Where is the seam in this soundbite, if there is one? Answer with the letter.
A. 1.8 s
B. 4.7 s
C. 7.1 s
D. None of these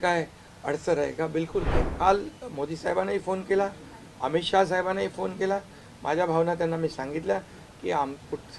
A